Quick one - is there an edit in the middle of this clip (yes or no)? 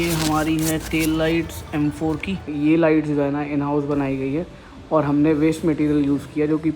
yes